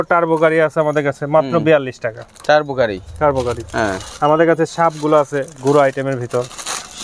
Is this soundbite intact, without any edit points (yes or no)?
yes